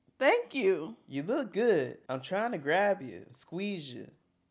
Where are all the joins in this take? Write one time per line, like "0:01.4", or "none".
0:02.0